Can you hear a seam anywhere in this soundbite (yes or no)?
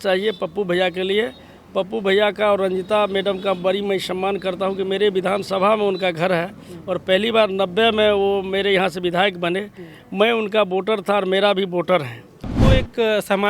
yes